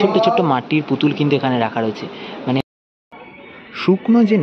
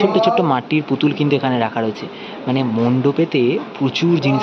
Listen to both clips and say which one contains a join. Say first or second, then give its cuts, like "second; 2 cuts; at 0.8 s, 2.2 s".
first; 1 cut; at 2.6 s